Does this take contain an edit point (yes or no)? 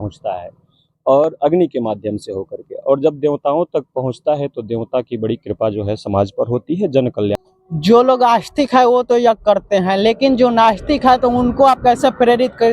yes